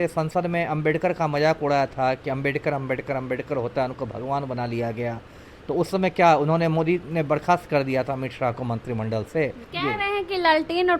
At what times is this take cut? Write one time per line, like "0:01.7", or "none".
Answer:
0:09.6